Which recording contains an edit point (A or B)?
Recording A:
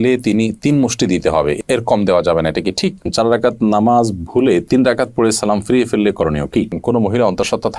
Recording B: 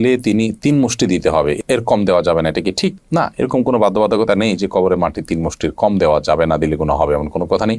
A